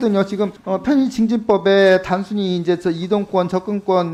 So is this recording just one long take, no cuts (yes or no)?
yes